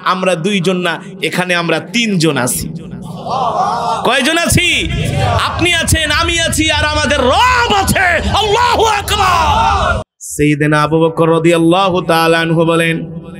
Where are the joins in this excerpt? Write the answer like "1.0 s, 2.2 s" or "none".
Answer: 10.0 s